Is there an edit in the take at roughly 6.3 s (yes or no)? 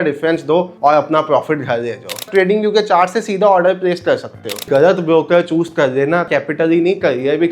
yes